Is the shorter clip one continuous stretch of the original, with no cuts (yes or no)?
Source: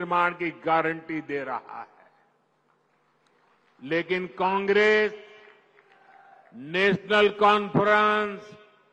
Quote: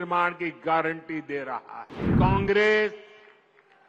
no